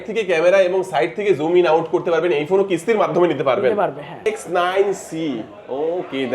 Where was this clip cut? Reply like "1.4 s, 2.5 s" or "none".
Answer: 4.2 s